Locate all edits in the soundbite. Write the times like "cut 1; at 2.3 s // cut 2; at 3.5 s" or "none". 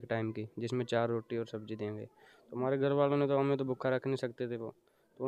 none